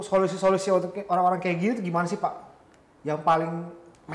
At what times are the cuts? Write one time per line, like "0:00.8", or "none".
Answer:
none